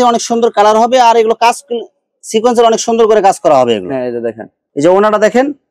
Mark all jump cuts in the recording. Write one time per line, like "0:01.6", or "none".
none